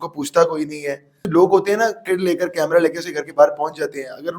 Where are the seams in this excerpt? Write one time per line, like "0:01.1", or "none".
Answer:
0:01.2

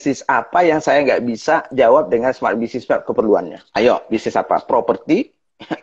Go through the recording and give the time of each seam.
0:03.6

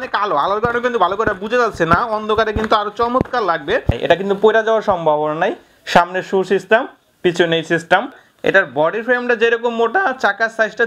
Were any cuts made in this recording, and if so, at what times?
0:04.0
0:08.2

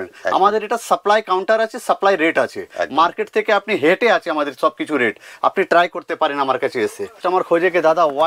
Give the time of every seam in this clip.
0:07.2

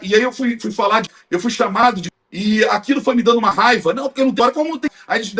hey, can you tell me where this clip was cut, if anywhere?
0:01.2
0:02.1
0:04.5

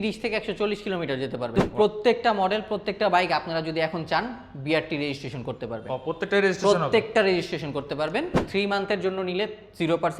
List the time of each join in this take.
0:01.5
0:08.4

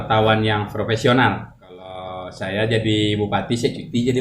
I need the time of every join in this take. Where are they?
0:02.1

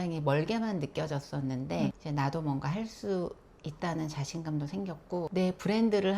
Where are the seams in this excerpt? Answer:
none

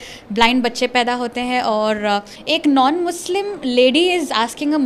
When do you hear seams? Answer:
0:02.3

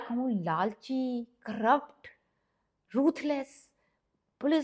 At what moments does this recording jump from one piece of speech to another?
none

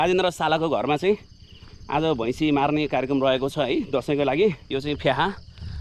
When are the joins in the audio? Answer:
0:04.6

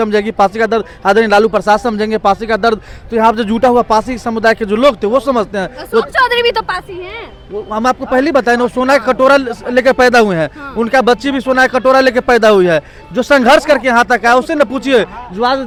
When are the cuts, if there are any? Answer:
none

